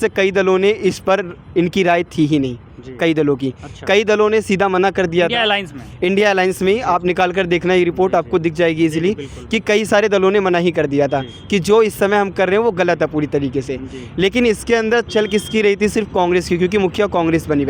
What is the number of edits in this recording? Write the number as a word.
zero